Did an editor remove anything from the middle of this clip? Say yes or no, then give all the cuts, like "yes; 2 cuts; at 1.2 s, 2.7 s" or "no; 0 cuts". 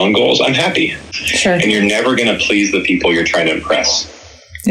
yes; 1 cut; at 1.2 s